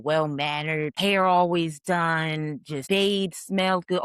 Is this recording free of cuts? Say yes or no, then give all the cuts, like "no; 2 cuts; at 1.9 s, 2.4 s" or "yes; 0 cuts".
no; 2 cuts; at 0.9 s, 2.7 s